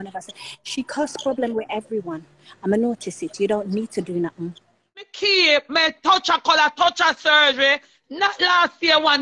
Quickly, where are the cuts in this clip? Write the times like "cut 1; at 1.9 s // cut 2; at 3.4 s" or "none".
cut 1; at 5.1 s